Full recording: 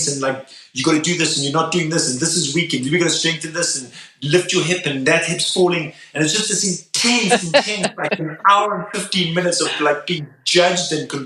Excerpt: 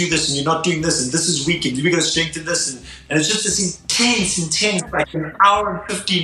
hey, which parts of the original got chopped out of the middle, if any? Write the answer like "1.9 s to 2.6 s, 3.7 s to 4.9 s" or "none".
4.0 s to 6.0 s